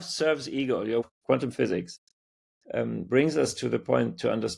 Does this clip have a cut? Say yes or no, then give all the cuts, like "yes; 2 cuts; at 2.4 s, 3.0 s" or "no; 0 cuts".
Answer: yes; 1 cut; at 1.0 s